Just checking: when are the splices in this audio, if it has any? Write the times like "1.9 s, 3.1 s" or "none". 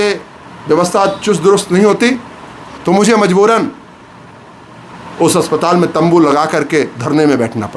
none